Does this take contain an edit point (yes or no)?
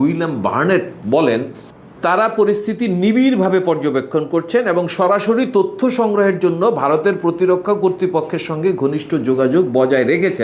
no